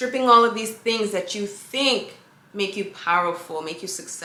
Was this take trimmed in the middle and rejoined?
no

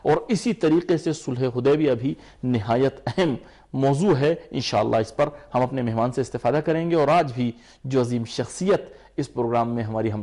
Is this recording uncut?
yes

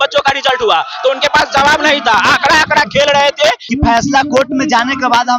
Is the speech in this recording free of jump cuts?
no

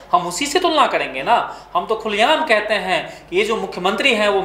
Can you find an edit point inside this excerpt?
no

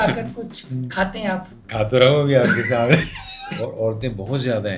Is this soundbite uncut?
no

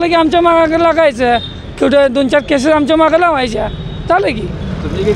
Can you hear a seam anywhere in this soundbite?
no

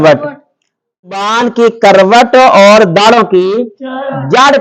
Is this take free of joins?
no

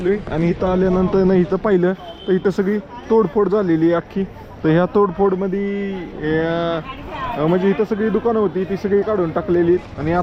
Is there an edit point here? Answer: no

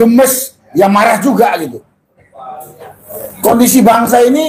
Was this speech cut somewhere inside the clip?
no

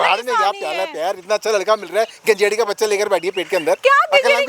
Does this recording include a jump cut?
no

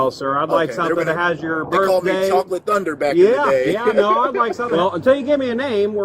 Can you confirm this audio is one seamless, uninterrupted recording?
no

